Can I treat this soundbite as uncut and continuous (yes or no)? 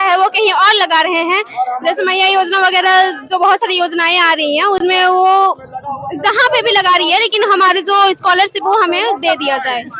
yes